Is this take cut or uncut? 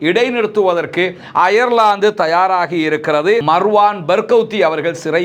cut